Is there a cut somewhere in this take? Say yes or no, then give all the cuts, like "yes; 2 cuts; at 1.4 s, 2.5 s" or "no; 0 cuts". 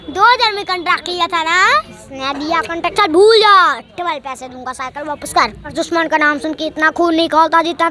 yes; 1 cut; at 5.7 s